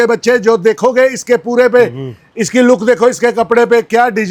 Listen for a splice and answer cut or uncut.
uncut